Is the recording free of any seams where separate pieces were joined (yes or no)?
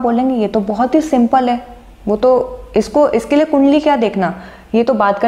yes